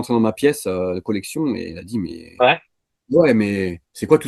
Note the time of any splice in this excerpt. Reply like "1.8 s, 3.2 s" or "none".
none